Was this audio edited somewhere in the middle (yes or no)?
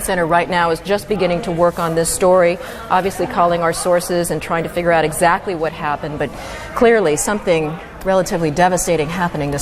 yes